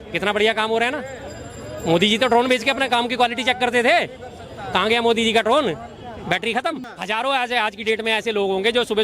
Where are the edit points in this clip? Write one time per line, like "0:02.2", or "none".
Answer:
0:06.8